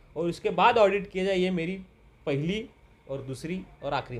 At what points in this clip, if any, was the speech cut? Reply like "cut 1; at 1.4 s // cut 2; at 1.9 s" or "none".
none